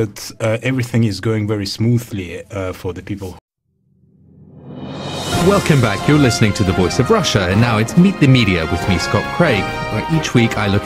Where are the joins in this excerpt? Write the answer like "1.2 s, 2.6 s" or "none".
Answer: none